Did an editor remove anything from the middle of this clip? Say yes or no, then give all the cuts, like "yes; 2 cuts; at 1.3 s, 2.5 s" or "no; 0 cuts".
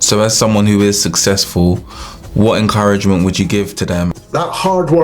yes; 1 cut; at 4.1 s